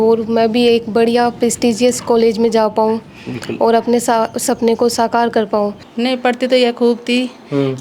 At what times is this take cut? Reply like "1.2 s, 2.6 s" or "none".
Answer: 5.8 s